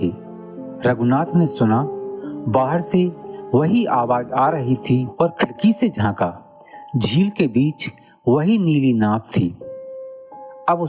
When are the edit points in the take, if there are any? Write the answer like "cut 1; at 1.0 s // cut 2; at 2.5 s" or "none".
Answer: cut 1; at 5.1 s